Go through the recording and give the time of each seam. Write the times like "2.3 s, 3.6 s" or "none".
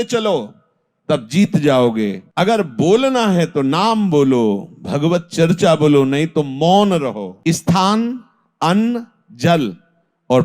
2.2 s, 7.3 s